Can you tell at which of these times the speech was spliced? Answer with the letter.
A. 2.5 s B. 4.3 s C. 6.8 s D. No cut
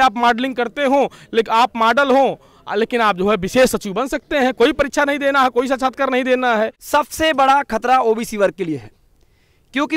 C